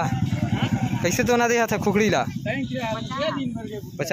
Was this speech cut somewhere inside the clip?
no; 0 cuts

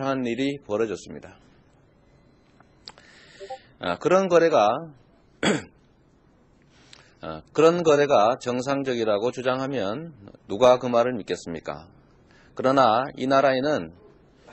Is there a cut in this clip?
yes; 1 cut; at 6.3 s

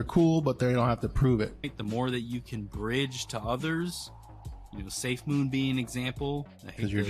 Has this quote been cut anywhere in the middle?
yes; 1 cut; at 1.7 s

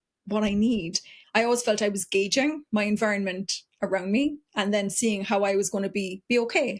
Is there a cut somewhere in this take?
yes; 1 cut; at 1.2 s

